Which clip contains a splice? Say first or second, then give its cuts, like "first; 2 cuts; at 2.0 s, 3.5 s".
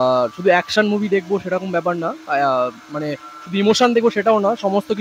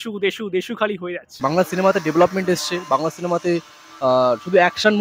second; 1 cut; at 1.3 s